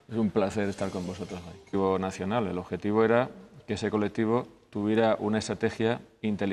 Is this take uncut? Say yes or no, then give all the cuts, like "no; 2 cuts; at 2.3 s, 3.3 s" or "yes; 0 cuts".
yes; 0 cuts